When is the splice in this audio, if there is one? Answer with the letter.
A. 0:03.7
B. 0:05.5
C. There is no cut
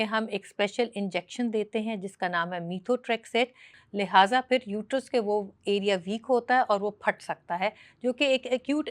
A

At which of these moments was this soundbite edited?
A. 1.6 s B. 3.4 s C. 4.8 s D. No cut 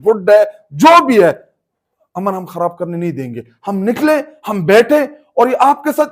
D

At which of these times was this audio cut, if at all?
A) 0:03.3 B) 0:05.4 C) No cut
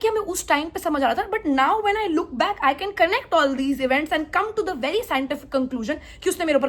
C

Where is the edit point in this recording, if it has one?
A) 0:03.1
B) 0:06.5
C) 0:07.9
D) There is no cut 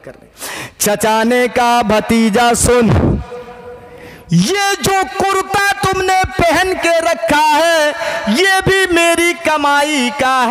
D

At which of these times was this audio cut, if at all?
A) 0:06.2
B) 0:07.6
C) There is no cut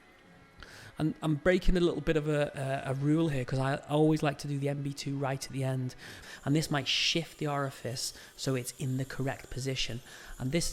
A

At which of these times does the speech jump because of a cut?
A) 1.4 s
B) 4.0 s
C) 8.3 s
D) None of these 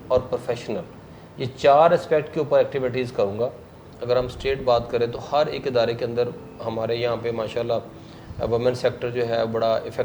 B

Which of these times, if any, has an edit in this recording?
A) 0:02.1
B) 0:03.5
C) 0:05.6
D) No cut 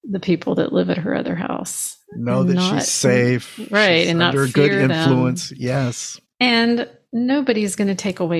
D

